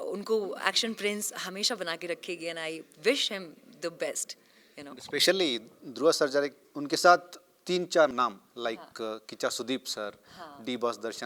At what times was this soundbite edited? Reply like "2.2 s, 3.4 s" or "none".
none